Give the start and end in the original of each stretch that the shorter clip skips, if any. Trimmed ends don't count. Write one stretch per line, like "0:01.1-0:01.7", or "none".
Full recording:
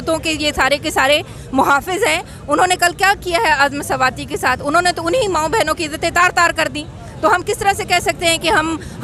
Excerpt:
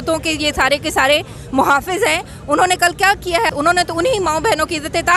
0:03.5-0:04.6